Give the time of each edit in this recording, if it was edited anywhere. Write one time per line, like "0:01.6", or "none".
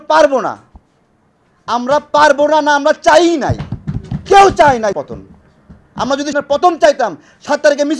0:04.9
0:06.3